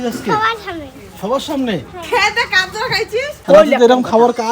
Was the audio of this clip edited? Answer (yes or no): yes